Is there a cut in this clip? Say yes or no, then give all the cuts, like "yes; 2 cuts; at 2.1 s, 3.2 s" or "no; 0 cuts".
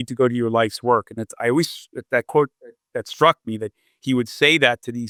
no; 0 cuts